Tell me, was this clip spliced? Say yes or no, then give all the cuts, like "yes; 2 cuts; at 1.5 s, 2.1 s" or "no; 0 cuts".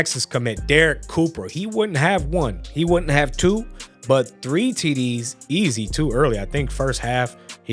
no; 0 cuts